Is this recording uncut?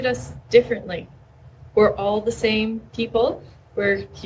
no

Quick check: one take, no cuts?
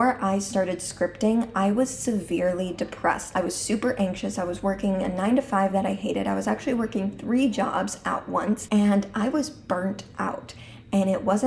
yes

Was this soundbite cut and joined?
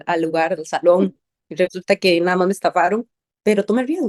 no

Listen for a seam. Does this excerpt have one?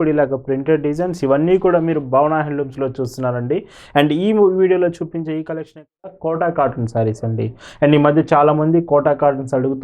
yes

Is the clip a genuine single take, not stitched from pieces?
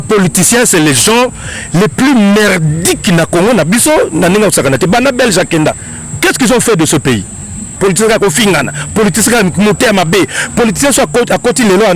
no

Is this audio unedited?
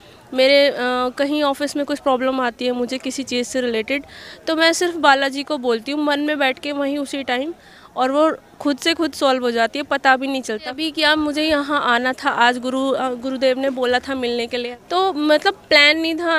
no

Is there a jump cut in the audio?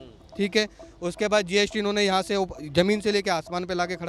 no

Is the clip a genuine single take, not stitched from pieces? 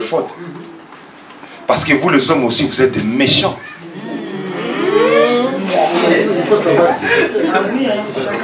yes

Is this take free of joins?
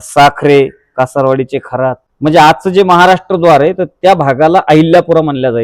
no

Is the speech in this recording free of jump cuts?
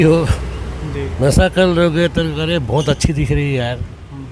yes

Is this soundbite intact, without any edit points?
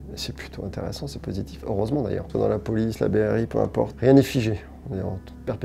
no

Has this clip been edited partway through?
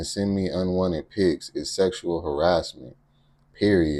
no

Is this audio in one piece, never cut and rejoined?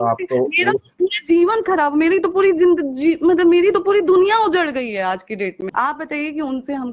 no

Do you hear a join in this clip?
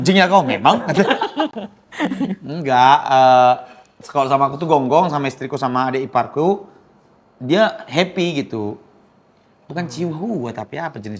no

